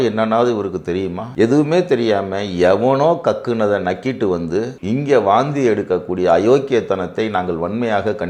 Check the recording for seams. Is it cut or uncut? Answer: uncut